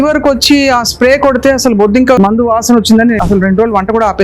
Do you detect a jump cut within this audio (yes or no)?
yes